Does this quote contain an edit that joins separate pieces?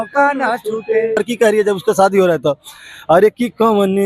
yes; 1 cut; at 1.2 s

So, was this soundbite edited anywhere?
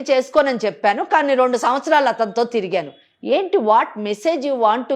no; 0 cuts

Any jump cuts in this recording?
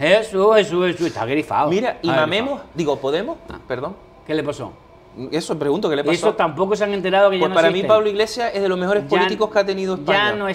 no; 0 cuts

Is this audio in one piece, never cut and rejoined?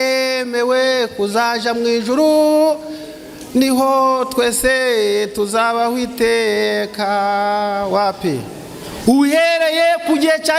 yes; 0 cuts

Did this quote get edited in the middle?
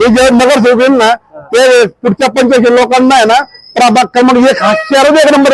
no; 0 cuts

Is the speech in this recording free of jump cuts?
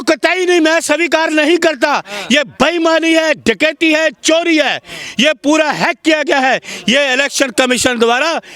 yes; 0 cuts

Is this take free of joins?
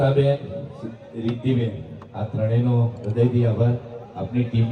yes; 0 cuts

